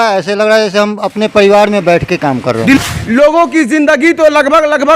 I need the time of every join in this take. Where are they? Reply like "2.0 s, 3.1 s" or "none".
2.8 s

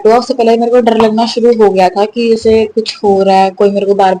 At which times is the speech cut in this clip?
none

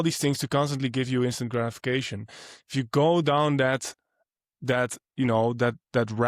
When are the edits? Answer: none

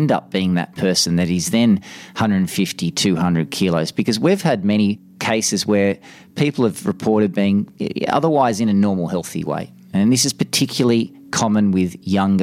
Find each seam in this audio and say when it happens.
5.1 s

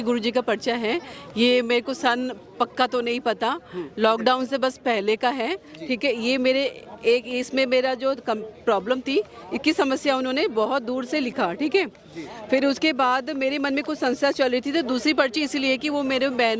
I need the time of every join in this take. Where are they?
none

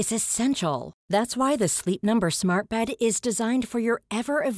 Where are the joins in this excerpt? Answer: none

